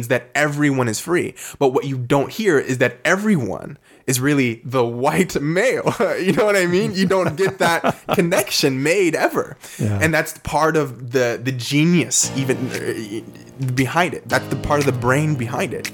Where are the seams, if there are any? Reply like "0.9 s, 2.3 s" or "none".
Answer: none